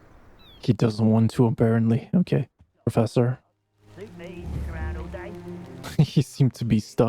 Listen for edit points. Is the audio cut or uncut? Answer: cut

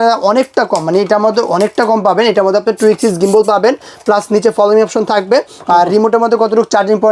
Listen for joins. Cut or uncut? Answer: uncut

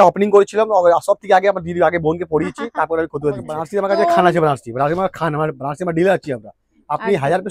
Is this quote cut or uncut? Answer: cut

